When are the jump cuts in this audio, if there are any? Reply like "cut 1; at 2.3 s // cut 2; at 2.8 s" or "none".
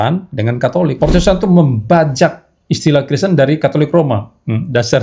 cut 1; at 0.9 s